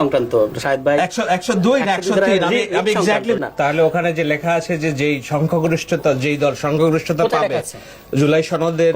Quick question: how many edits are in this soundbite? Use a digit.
1